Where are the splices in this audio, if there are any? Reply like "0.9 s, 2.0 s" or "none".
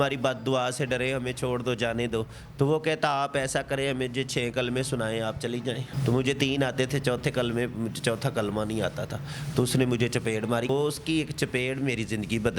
5.9 s, 10.7 s